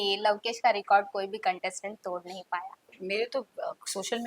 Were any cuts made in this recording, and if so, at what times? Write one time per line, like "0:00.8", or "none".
0:02.9